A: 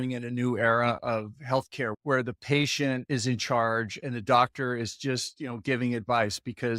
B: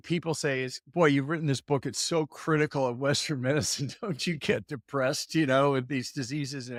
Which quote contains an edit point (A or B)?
A